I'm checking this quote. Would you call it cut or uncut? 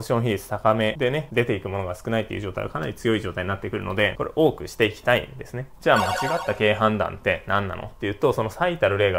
uncut